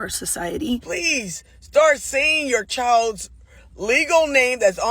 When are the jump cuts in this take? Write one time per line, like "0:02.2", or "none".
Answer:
0:00.9